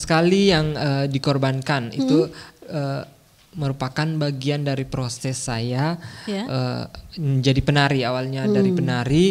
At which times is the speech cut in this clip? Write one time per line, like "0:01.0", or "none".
none